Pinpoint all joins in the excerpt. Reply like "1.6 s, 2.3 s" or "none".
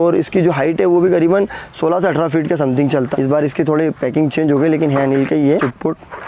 3.1 s, 5.5 s